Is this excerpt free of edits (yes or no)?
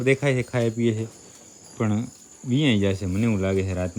yes